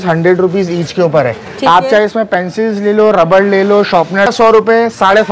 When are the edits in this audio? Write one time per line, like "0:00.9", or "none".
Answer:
0:04.3